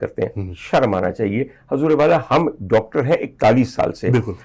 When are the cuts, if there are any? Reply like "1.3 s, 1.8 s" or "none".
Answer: none